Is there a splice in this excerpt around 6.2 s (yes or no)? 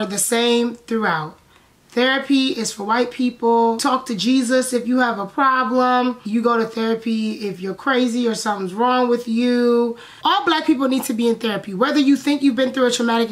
yes